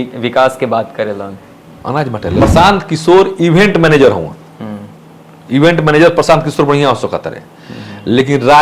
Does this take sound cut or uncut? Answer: cut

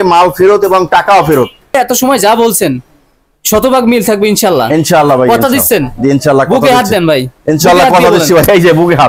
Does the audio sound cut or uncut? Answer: cut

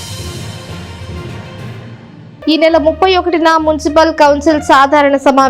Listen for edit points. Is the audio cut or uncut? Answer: cut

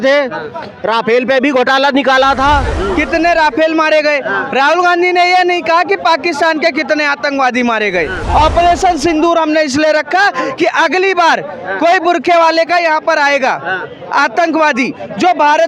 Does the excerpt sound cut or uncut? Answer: cut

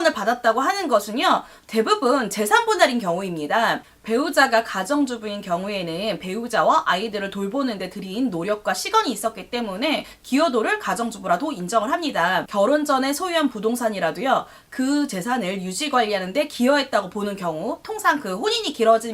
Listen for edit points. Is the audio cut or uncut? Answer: cut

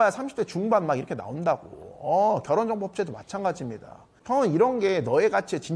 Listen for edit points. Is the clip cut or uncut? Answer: uncut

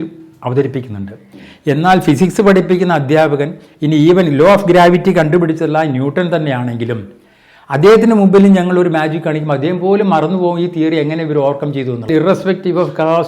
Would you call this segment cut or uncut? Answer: cut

